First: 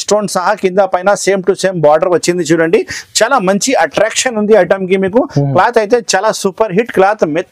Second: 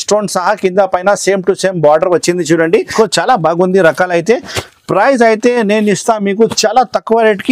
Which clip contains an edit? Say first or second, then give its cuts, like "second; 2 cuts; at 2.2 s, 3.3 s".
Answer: second; 1 cut; at 2.9 s